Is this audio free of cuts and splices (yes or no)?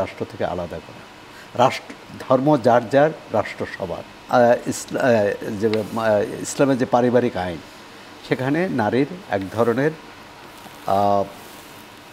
no